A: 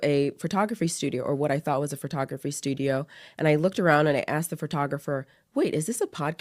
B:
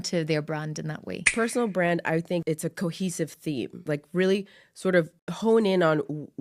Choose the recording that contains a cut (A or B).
B